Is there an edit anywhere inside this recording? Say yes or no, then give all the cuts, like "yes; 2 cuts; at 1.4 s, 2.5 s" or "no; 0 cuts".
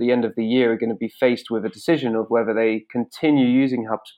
no; 0 cuts